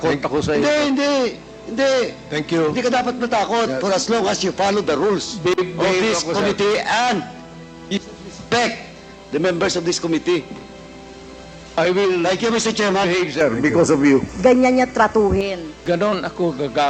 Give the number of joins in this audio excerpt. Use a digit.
2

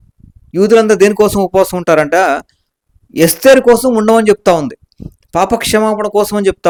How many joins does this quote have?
0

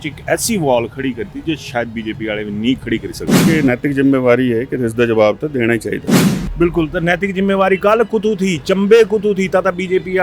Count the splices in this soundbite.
1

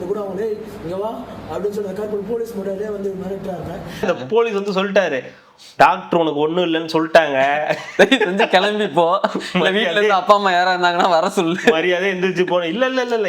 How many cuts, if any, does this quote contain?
1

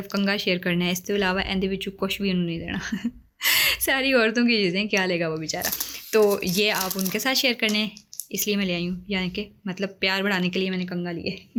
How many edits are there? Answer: 0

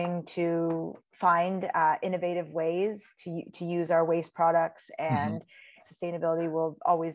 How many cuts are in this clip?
2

